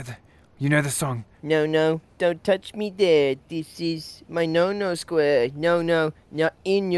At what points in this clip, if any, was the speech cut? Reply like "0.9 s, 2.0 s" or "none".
1.3 s

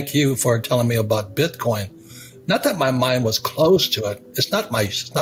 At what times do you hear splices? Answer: none

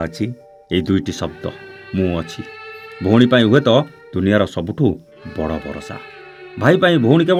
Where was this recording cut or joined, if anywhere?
none

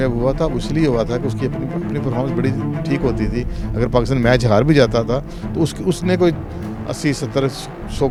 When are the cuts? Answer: none

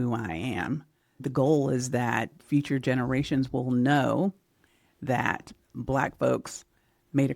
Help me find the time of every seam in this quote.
1.3 s, 2.4 s

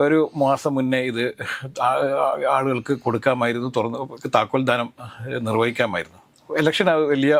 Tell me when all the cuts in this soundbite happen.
none

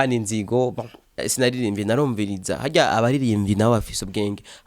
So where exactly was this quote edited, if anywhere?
1.3 s

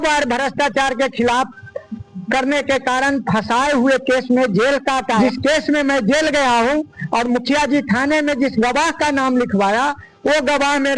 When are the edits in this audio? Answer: 5.1 s

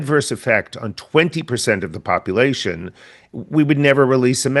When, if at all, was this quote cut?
none

